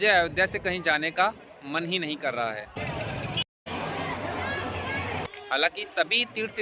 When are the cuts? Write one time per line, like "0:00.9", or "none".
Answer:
0:02.8
0:05.3